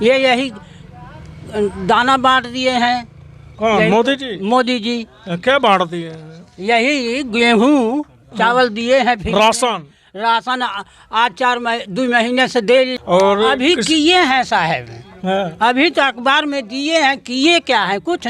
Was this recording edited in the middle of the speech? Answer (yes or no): yes